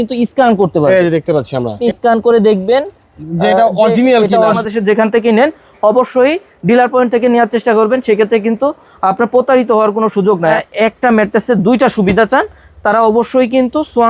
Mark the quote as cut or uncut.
cut